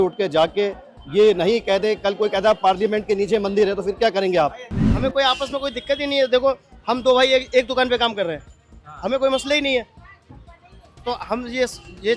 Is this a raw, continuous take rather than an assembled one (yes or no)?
no